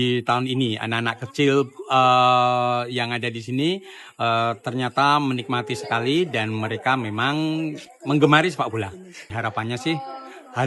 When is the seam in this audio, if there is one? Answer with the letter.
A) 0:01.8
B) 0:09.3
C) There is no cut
B